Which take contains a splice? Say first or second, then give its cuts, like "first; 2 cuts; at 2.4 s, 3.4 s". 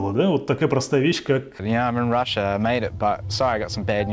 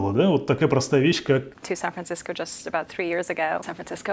first; 1 cut; at 1.6 s